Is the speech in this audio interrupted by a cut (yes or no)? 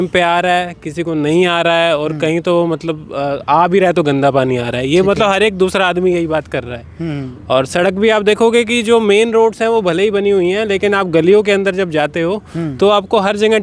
no